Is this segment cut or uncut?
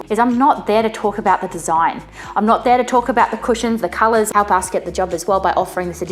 cut